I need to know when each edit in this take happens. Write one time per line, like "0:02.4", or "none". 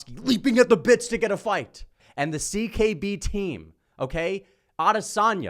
0:02.0